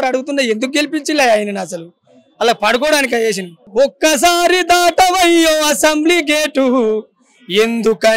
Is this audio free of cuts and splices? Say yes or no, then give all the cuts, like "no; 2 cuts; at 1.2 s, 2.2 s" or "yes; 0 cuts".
no; 1 cut; at 3.6 s